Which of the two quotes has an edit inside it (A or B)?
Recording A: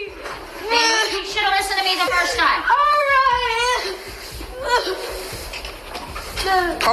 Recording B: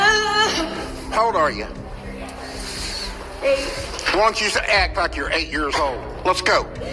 A